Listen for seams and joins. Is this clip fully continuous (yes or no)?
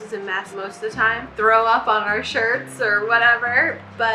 yes